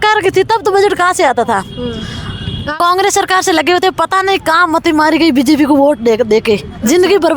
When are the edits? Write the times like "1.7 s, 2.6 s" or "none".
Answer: 2.8 s